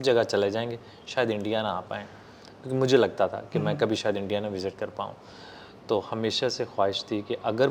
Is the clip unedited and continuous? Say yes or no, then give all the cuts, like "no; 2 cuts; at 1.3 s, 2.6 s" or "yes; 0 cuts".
yes; 0 cuts